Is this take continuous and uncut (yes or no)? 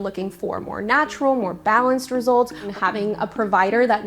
no